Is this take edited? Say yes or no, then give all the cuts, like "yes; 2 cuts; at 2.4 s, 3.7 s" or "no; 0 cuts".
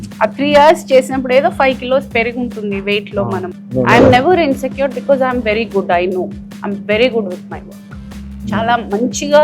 yes; 1 cut; at 3.5 s